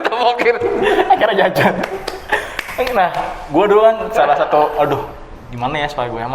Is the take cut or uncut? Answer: uncut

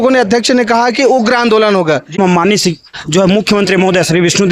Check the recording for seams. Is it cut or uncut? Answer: cut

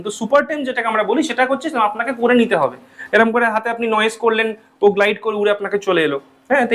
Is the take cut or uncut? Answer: uncut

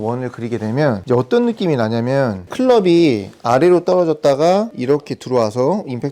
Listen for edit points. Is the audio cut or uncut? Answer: cut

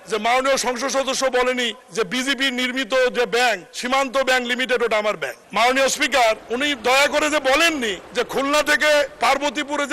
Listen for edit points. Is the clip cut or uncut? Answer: cut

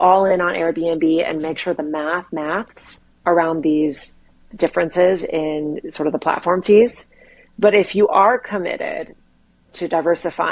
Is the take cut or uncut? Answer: cut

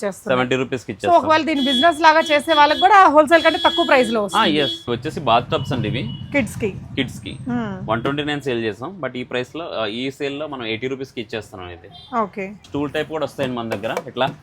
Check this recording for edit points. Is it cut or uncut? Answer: cut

